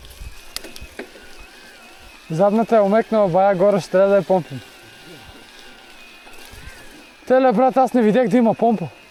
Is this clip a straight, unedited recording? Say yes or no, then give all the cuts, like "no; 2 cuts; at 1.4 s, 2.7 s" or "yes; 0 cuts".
yes; 0 cuts